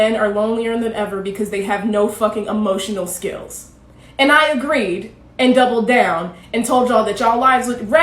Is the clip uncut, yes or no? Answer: no